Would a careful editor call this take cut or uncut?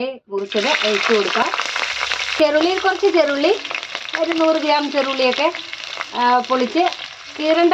cut